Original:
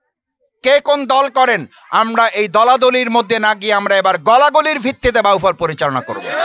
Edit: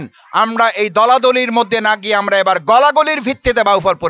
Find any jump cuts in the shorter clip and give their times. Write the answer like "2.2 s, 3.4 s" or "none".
none